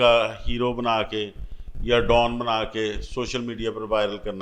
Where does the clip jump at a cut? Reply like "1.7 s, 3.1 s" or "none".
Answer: none